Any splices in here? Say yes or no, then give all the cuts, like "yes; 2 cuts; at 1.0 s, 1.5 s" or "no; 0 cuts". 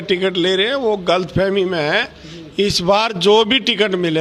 no; 0 cuts